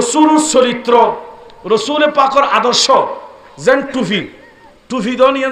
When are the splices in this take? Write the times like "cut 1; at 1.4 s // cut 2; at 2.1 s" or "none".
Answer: none